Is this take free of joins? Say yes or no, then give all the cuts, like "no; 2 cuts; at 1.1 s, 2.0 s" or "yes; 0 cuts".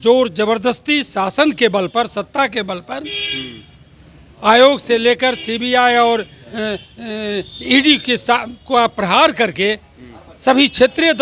yes; 0 cuts